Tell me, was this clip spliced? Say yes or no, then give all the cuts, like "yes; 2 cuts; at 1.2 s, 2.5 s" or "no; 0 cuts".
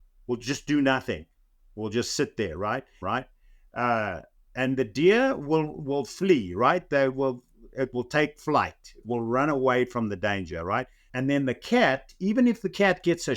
yes; 2 cuts; at 2.9 s, 11.0 s